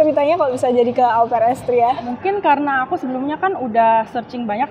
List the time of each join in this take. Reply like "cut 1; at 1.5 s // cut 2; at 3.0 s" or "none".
cut 1; at 2.1 s